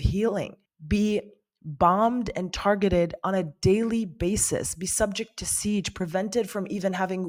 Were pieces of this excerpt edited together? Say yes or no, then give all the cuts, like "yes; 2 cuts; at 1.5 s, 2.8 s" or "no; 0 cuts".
no; 0 cuts